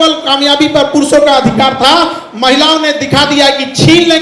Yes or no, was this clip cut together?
no